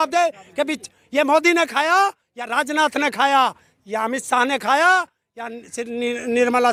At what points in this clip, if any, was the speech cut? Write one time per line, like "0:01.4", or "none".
none